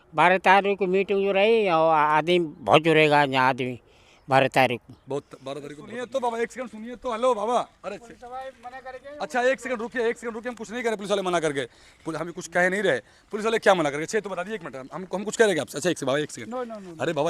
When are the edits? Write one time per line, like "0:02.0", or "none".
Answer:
0:05.7